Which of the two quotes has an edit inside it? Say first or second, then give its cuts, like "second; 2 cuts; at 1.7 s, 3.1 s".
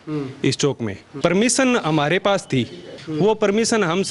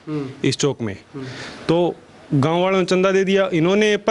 first; 2 cuts; at 1.0 s, 3.0 s